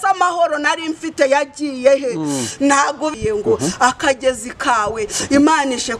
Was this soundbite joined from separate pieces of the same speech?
yes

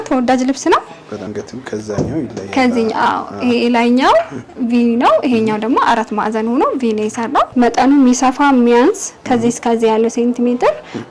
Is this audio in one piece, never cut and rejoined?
no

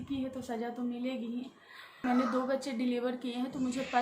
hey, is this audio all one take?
no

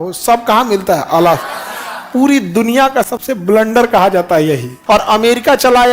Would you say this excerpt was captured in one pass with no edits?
no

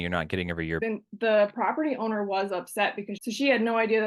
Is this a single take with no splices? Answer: no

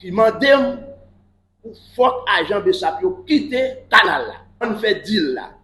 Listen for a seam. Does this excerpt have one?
yes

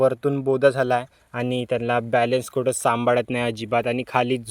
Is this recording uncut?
yes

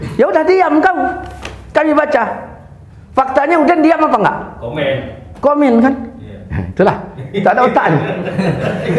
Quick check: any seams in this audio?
no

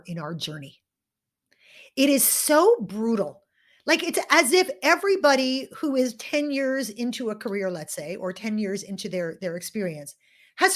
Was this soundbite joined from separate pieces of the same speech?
no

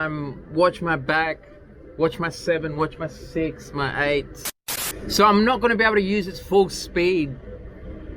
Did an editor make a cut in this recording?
yes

